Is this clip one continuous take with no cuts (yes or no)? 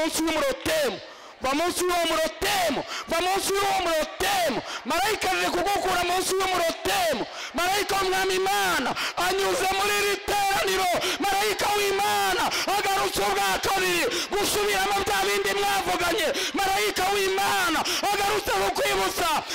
yes